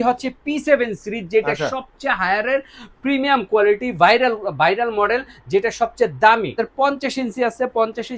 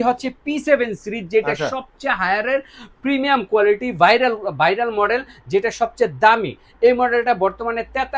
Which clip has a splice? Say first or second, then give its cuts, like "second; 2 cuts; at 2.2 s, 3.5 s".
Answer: first; 1 cut; at 6.6 s